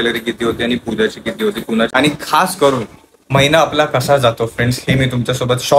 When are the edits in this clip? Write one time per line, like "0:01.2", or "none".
0:01.9